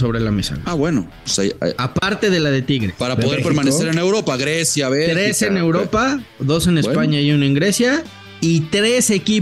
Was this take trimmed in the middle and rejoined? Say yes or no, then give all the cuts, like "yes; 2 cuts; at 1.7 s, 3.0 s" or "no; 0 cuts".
no; 0 cuts